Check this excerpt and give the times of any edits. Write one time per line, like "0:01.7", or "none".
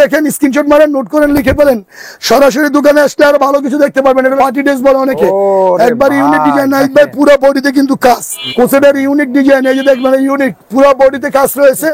0:04.4
0:08.4